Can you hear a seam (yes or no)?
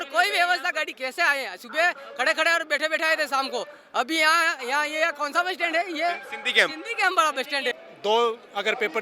yes